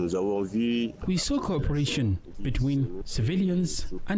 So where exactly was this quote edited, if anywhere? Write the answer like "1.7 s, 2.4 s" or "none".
1.0 s, 2.3 s, 3.0 s

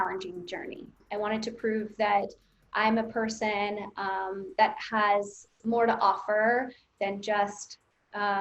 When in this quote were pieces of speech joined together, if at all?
1.0 s

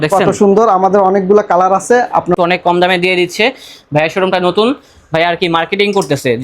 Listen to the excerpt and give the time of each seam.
2.4 s

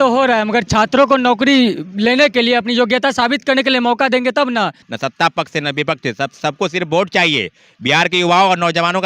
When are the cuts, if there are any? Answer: 4.8 s

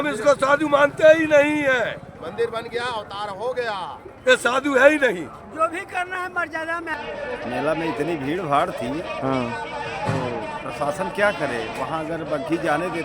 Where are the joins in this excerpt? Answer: 6.9 s

